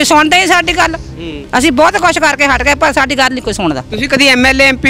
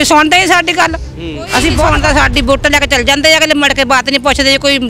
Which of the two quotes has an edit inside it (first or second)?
second